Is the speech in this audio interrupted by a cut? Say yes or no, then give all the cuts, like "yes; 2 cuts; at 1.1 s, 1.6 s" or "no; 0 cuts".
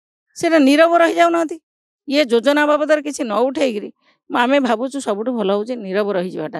no; 0 cuts